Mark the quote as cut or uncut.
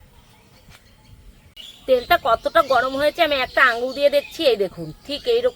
cut